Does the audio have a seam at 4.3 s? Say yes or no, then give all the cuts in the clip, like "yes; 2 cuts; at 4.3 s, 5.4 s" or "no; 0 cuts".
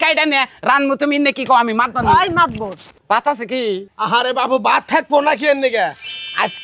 no; 1 cut; at 2.9 s